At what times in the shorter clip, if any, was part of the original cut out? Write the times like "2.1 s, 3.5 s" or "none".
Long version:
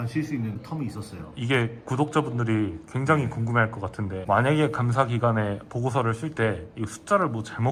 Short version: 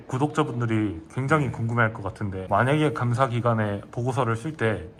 none